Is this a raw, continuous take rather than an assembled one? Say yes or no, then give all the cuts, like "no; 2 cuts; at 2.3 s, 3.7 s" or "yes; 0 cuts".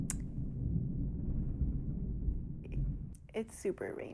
no; 1 cut; at 3.2 s